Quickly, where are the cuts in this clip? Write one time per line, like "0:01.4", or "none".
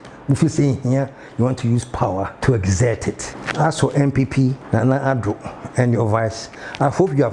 0:02.3
0:03.3
0:04.6